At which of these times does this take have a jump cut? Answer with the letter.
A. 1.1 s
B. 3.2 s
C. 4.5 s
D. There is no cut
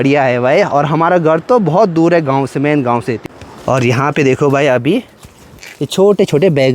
B